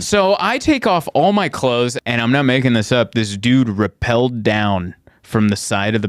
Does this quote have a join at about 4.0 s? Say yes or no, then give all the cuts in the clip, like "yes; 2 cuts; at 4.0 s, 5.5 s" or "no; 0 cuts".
no; 1 cut; at 2.0 s